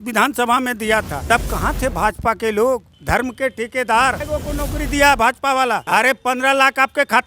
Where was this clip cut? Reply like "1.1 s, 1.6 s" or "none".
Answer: 1.2 s, 2.9 s, 4.2 s, 5.8 s